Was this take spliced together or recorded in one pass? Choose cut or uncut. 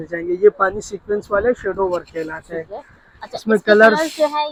uncut